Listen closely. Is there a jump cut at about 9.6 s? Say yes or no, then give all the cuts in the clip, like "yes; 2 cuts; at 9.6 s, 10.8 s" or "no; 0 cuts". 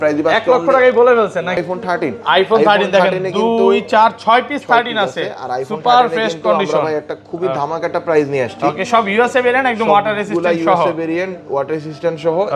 no; 1 cut; at 1.6 s